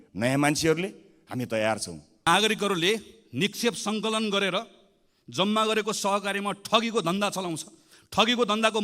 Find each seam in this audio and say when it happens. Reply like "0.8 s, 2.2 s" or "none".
2.3 s